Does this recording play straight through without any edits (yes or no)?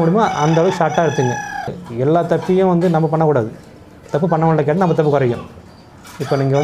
no